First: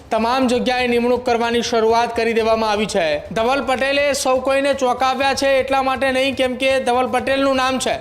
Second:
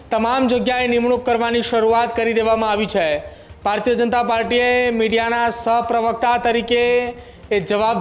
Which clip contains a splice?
first; 1 cut; at 3.3 s

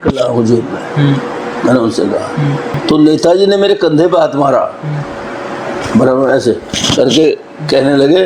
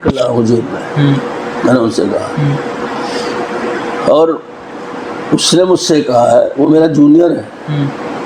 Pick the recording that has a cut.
first; 1 cut; at 2.7 s

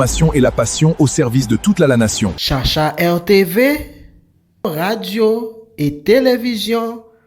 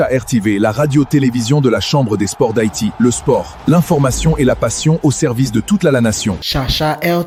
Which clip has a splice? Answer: first; 1 cut; at 4.6 s

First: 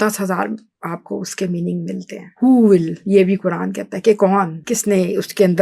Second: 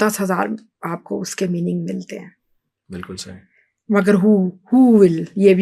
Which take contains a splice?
first; 2 cuts; at 2.3 s, 4.6 s

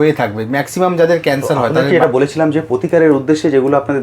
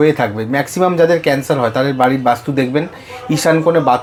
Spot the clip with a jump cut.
first; 1 cut; at 1.8 s

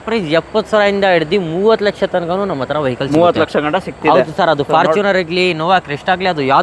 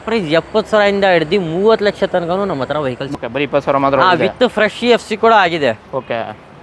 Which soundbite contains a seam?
second; 1 cut; at 3.0 s

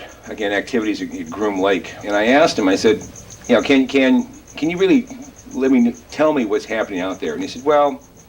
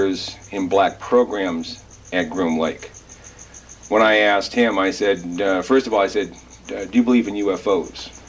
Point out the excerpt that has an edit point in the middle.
first; 1 cut; at 2.2 s

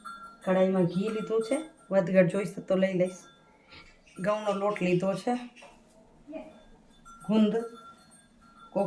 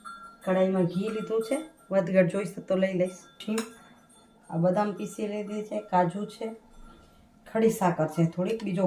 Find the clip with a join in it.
second; 1 cut; at 3.4 s

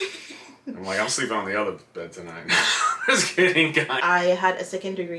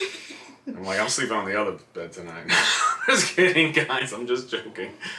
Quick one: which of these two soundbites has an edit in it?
first; 1 cut; at 4.0 s

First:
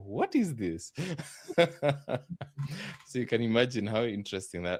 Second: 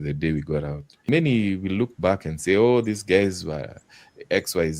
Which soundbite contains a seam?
second; 1 cut; at 1.1 s

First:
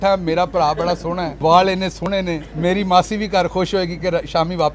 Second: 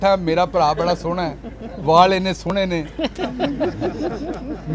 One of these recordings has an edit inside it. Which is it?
first; 2 cuts; at 1.3 s, 2.5 s

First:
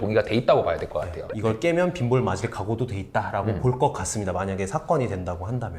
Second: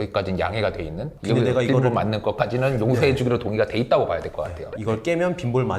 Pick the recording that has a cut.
second; 1 cut; at 1.1 s

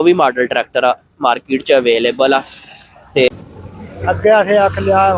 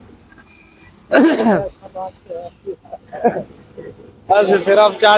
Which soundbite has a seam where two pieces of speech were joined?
first; 1 cut; at 3.3 s

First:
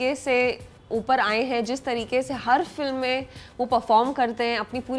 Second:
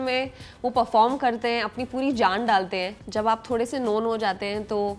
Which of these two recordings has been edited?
second; 1 cut; at 3.0 s

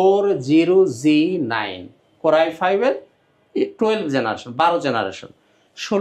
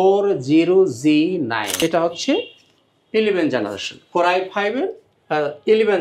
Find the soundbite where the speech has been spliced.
second; 1 cut; at 1.7 s

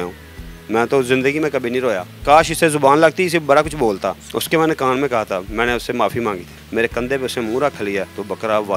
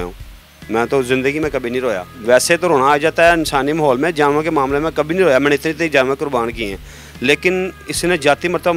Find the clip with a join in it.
first; 3 cuts; at 2.1 s, 4.3 s, 6.6 s

